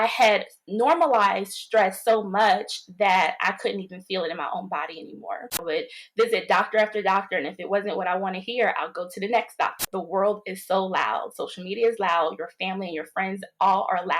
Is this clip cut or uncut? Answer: cut